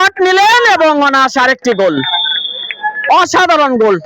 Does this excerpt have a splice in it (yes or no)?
no